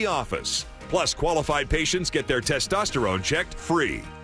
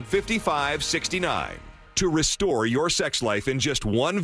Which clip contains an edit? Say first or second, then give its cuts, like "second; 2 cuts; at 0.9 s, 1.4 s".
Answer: second; 1 cut; at 1.5 s